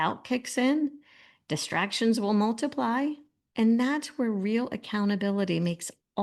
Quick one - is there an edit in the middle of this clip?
no; 0 cuts

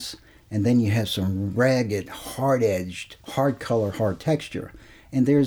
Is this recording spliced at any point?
no; 0 cuts

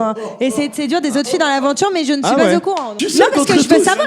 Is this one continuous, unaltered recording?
no; 1 cut; at 2.9 s

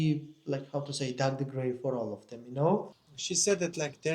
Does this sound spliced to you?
yes; 1 cut; at 3.0 s

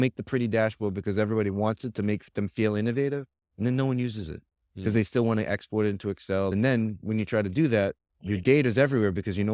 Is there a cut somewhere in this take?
yes; 1 cut; at 6.5 s

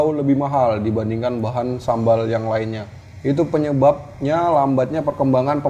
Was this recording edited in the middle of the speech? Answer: no; 0 cuts

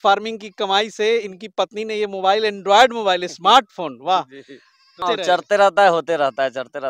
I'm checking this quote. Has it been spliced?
yes; 1 cut; at 5.0 s

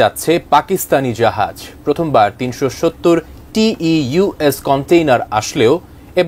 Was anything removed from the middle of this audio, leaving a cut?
no; 0 cuts

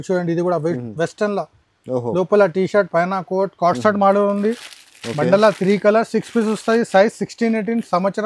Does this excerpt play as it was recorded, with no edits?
yes; 0 cuts

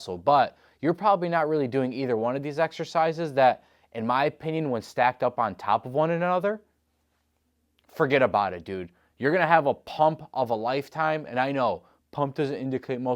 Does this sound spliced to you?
no; 0 cuts

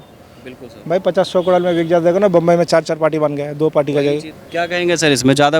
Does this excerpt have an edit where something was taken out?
yes; 1 cut; at 4.4 s

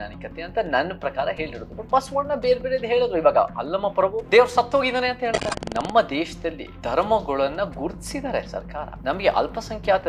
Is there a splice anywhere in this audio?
yes; 4 cuts; at 4.2 s, 5.5 s, 6.7 s, 8.9 s

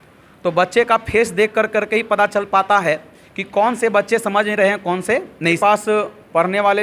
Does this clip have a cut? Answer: yes; 1 cut; at 5.6 s

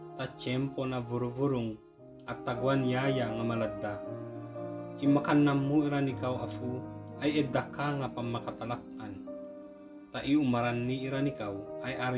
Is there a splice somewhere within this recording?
no; 0 cuts

